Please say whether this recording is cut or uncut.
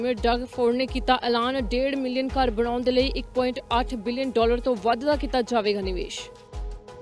cut